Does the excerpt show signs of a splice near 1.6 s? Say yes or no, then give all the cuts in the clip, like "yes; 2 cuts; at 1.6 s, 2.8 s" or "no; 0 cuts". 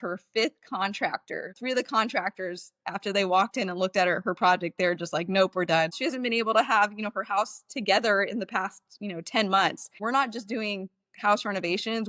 yes; 3 cuts; at 1.6 s, 6.0 s, 10.0 s